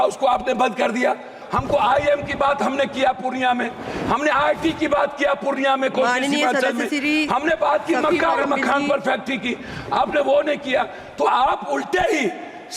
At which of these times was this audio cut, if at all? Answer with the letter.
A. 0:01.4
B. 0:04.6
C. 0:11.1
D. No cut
A